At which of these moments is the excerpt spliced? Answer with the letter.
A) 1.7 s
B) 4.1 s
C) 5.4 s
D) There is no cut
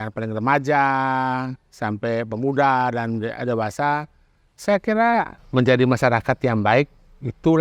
C